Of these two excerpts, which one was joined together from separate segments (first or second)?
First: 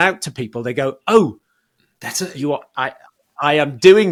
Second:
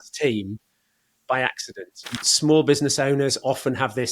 second